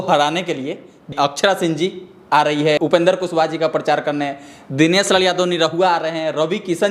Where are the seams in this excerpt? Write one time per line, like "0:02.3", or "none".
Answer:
0:01.1
0:02.8

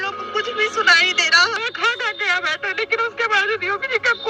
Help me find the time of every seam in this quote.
0:01.6

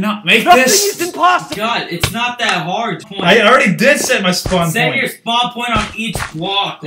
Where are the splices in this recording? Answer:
0:03.1

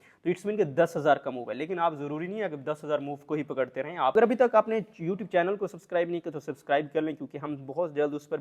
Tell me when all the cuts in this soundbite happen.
0:04.1

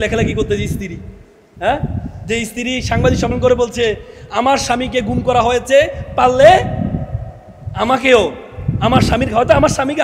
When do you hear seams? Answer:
none

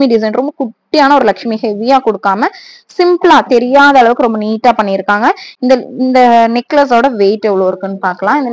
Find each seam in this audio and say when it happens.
none

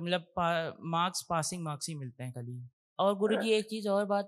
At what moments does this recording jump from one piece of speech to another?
0:02.8

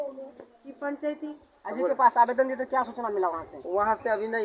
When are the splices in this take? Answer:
0:01.3

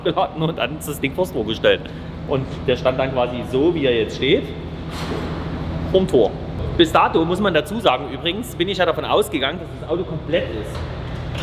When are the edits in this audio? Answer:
none

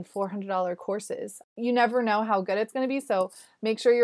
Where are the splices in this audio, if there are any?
0:01.3

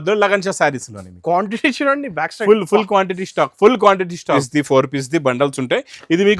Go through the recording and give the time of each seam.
0:04.4

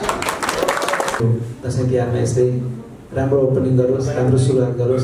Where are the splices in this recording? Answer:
0:01.2

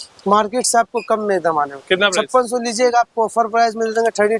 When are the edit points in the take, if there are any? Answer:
none

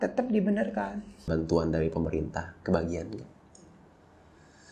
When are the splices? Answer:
0:01.3

